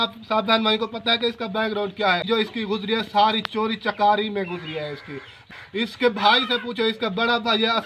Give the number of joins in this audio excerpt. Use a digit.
2